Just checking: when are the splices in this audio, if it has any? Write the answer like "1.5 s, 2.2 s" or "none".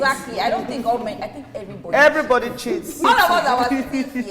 3.0 s